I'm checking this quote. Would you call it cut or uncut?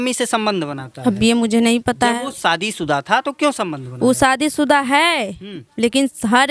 uncut